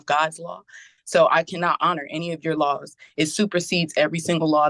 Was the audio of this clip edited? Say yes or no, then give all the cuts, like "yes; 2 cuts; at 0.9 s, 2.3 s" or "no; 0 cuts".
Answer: no; 0 cuts